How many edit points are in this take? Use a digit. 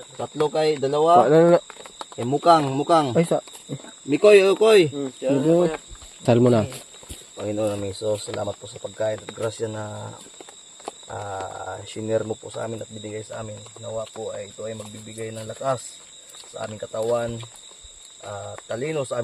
1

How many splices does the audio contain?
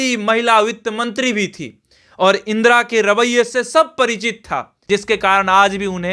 1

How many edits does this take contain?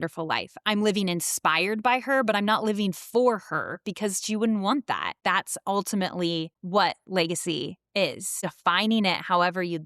3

